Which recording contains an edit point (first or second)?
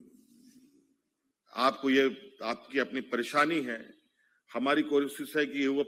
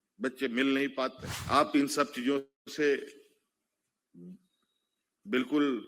second